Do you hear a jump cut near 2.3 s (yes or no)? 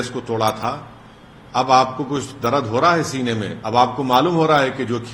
no